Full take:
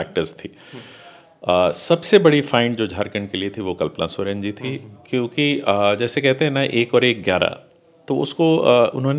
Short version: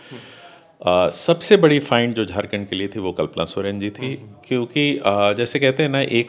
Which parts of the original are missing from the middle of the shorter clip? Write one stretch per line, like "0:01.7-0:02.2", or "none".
none

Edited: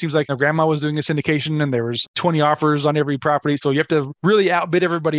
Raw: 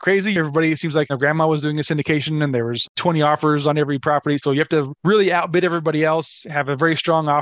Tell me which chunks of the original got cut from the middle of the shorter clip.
none

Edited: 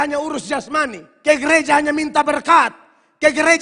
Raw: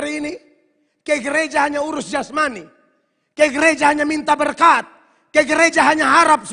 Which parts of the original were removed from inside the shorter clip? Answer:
0:02.7-0:03.2

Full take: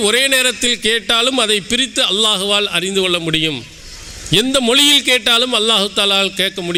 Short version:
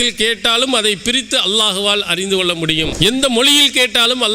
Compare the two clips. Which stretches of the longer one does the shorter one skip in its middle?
0:03.6-0:04.2

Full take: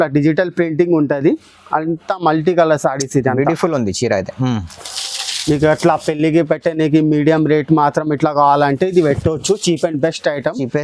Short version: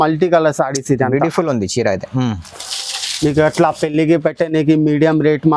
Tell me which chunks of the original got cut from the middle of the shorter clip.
none

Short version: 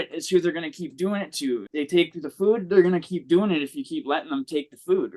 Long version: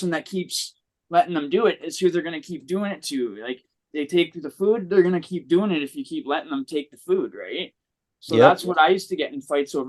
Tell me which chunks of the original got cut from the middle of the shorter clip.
0:03.4-0:03.9

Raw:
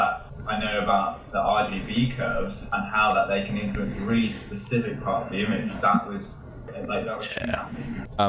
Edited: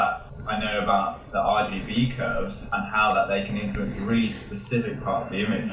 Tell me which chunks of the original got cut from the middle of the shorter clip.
none

